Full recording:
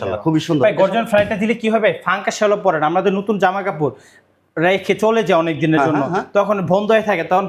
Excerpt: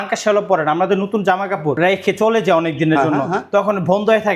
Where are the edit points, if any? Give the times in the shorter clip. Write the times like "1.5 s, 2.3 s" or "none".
1.8 s